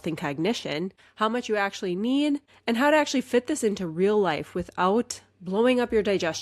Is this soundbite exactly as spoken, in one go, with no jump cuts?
no; 2 cuts; at 1.0 s, 2.5 s

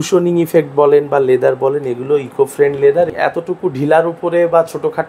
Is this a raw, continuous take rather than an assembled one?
no; 1 cut; at 3.1 s

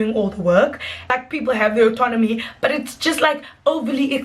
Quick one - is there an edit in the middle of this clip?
yes; 1 cut; at 1.0 s

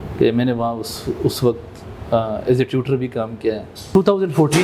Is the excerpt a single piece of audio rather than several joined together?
no; 1 cut; at 3.7 s

